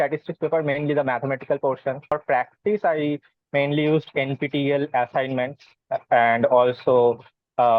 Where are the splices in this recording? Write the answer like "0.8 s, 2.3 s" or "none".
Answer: 2.1 s